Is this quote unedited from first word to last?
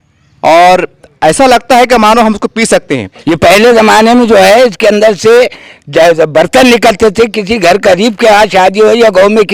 no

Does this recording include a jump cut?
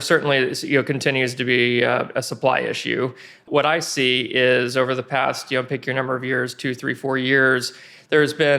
yes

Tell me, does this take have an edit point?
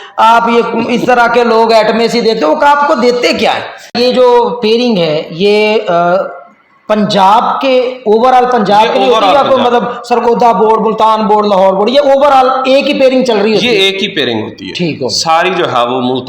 yes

